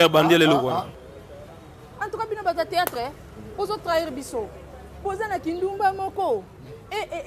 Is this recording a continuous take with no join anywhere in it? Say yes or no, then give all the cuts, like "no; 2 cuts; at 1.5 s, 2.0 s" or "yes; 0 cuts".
no; 1 cut; at 1.0 s